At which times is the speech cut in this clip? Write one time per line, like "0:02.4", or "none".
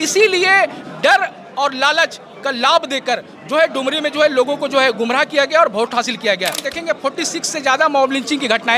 0:06.6